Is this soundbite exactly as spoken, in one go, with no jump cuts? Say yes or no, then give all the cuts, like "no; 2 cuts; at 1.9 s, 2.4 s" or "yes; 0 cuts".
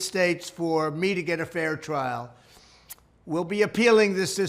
no; 1 cut; at 2.7 s